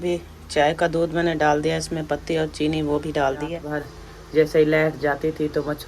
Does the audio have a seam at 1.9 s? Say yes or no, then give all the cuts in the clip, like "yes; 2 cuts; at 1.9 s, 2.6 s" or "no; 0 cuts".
no; 1 cut; at 3.6 s